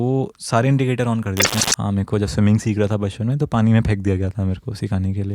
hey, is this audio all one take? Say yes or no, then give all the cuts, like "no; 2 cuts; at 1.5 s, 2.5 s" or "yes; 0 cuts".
no; 1 cut; at 1.6 s